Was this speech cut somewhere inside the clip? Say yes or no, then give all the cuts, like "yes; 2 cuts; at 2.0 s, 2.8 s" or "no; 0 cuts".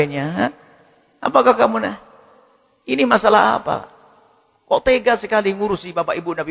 no; 0 cuts